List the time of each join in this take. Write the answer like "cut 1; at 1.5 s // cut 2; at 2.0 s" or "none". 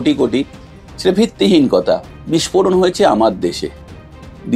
cut 1; at 2.1 s